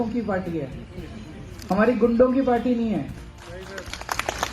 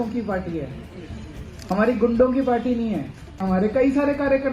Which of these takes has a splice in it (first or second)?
second